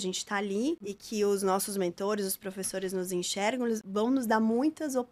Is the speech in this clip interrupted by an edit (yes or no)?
yes